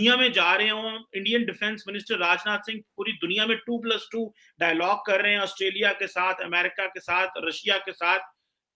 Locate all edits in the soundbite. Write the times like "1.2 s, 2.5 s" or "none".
none